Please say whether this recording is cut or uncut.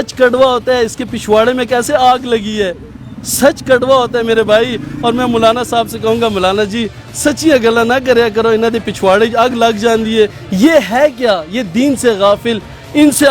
cut